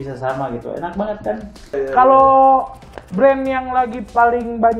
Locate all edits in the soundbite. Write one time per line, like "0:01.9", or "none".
0:01.7

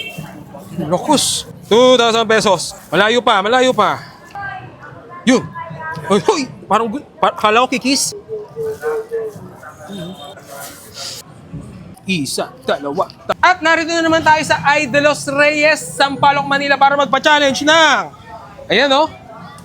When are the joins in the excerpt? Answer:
0:01.4

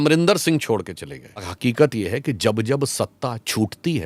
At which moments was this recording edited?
0:01.5

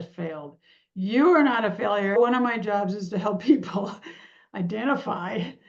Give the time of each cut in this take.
0:02.2

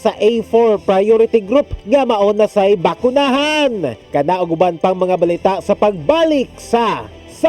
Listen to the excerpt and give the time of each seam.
none

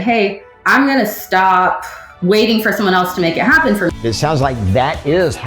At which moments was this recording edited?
0:04.0

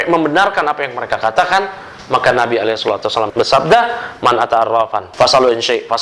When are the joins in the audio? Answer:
0:05.0

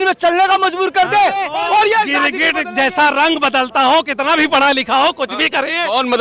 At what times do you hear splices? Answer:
0:01.5

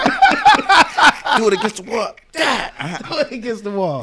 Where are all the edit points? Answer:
none

